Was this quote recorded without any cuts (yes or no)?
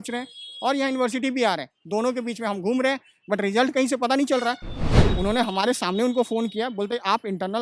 no